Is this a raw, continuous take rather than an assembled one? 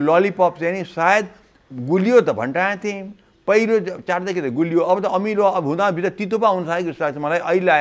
yes; 0 cuts

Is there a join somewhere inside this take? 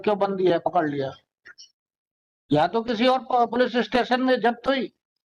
no; 0 cuts

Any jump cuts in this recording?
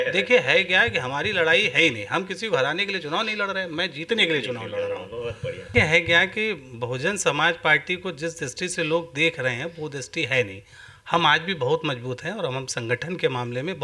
yes; 1 cut; at 5.7 s

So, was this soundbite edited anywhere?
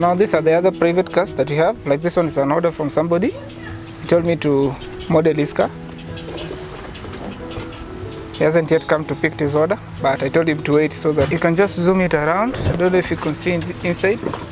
no; 0 cuts

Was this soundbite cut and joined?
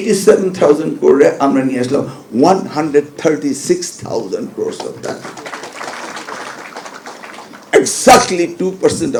no; 0 cuts

